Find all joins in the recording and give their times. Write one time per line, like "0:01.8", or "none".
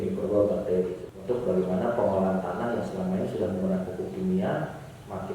0:01.0